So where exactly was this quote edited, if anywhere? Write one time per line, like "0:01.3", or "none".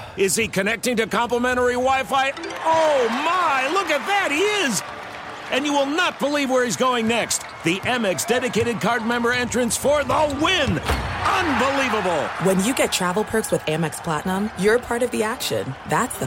none